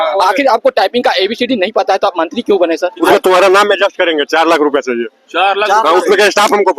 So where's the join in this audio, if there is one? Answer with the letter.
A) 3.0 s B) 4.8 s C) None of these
A